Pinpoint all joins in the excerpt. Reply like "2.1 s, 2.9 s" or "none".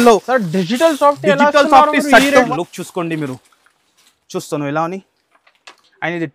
2.5 s